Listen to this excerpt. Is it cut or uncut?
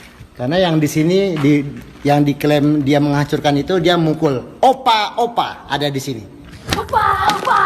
cut